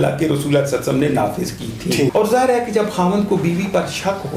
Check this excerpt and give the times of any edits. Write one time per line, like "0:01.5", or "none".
0:02.1